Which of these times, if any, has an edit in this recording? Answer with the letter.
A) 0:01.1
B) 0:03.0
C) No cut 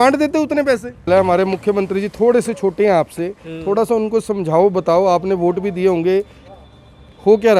A